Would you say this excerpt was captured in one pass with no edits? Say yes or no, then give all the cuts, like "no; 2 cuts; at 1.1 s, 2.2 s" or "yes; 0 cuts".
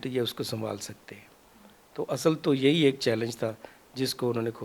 yes; 0 cuts